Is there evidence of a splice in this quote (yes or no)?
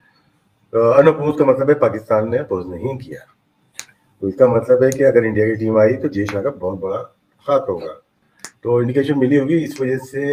no